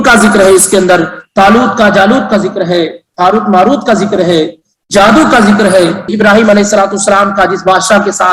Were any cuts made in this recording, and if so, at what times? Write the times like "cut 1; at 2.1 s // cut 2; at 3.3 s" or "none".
cut 1; at 6.1 s